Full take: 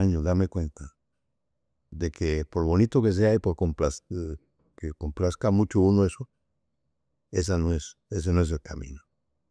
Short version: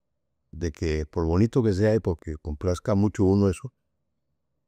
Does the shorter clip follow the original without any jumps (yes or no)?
no